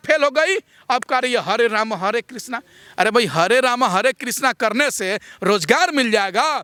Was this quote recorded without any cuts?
yes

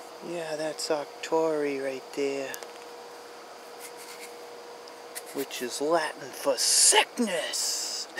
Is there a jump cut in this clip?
no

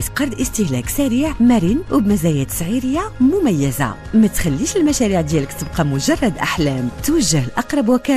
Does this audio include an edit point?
no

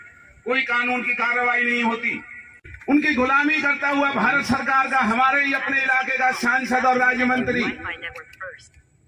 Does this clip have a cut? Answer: yes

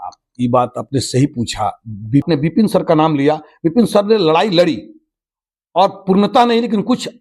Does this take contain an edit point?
yes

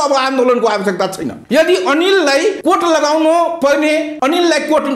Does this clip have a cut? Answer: yes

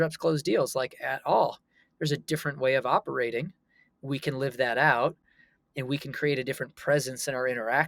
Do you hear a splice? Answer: no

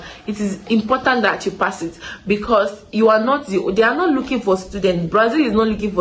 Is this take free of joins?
yes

